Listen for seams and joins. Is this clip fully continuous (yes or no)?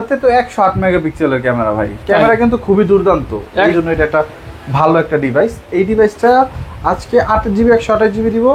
no